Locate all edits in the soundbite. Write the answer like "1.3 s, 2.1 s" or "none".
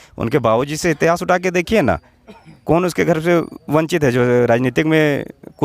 none